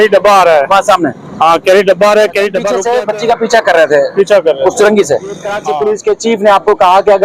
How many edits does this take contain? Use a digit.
2